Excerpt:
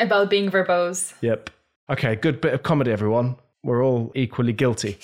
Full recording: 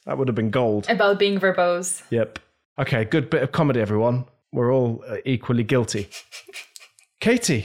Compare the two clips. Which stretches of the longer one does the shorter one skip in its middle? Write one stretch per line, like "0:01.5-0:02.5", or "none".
0:05.0-0:05.2